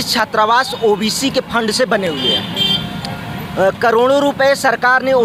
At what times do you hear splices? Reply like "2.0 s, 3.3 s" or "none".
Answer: none